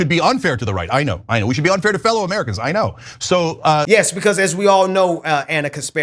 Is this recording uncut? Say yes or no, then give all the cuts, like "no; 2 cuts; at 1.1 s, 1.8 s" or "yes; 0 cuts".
yes; 0 cuts